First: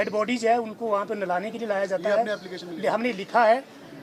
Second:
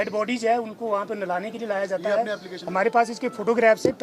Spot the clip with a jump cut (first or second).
second